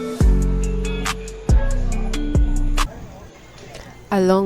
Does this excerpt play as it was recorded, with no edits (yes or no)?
no